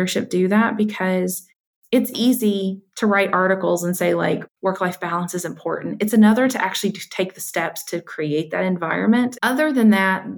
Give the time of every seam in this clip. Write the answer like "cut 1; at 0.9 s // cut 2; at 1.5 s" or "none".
cut 1; at 4.5 s // cut 2; at 9.3 s